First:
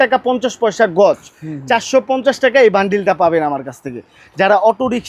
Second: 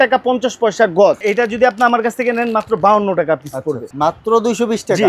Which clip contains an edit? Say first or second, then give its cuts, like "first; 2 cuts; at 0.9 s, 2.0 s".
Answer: second; 2 cuts; at 1.2 s, 3.9 s